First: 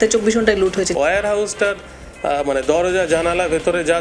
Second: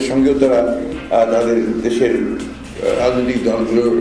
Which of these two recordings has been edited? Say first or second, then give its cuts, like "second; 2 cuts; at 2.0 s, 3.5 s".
first; 1 cut; at 0.9 s